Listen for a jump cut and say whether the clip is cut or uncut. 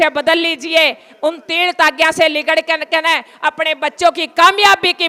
uncut